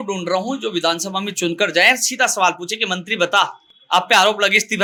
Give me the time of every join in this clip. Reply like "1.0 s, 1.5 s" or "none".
none

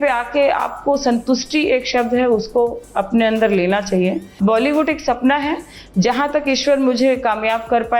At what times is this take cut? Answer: 4.3 s

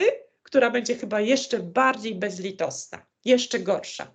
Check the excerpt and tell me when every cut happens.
none

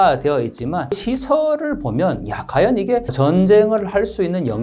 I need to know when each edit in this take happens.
1.0 s, 3.1 s

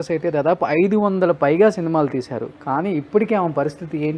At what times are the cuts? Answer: none

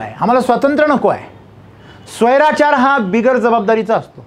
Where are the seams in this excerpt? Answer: none

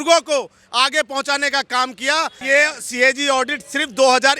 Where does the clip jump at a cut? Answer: 2.4 s

